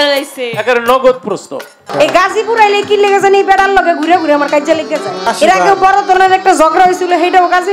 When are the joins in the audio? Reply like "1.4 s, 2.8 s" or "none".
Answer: 1.9 s, 5.2 s